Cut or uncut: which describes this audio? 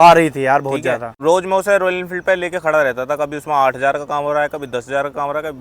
cut